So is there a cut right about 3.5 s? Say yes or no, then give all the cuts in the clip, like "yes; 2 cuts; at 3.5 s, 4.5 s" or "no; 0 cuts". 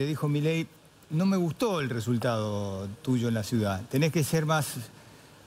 no; 0 cuts